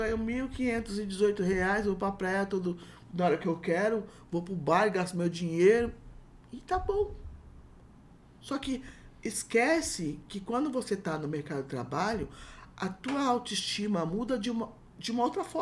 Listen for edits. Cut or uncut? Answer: uncut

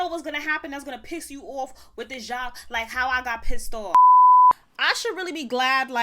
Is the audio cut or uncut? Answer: cut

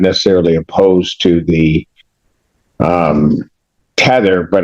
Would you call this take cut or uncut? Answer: uncut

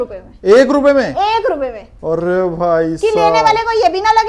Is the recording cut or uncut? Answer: uncut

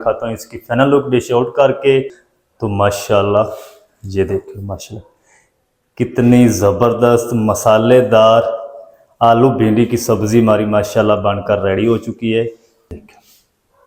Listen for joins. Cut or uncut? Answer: cut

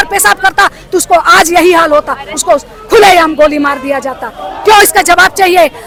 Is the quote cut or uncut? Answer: uncut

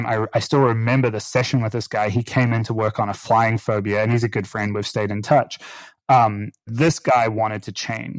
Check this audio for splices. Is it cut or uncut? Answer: cut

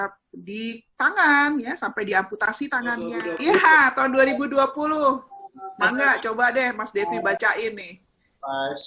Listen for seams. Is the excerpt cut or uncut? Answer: cut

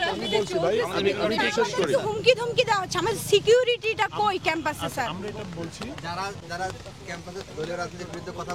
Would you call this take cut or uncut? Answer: uncut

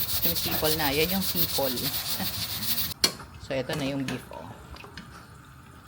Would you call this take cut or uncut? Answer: cut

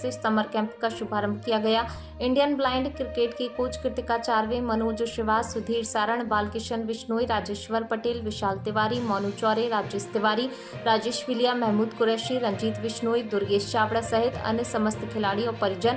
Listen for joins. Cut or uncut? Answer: uncut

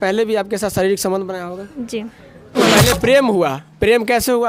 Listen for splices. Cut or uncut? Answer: cut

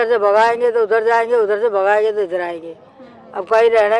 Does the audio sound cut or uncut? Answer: uncut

